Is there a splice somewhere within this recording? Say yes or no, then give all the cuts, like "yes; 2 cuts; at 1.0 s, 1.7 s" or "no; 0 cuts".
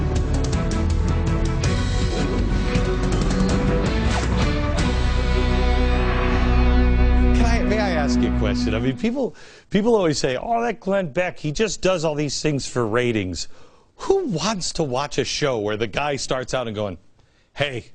yes; 1 cut; at 7.9 s